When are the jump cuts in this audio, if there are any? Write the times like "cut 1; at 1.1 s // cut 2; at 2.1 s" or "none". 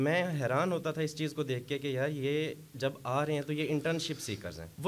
none